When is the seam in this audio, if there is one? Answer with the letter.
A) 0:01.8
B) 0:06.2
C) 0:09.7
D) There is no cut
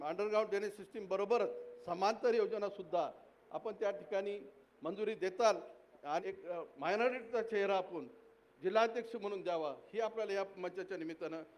B